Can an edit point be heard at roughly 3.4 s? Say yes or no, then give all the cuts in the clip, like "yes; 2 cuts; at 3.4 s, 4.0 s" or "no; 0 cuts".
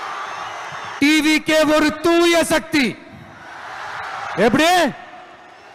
no; 0 cuts